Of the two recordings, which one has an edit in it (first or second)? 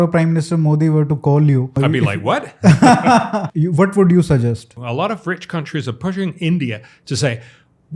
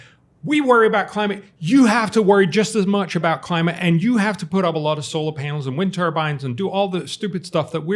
first